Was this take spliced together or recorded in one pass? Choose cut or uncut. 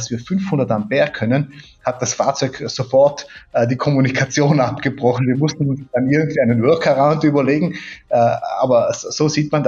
uncut